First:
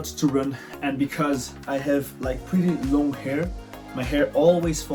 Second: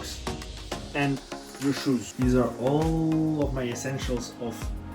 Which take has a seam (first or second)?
second